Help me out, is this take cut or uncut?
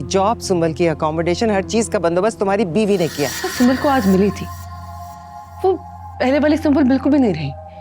cut